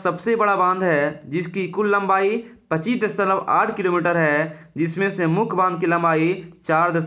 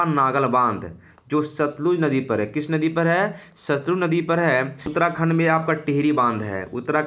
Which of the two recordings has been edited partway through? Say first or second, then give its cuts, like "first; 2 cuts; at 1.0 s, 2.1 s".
second; 1 cut; at 4.9 s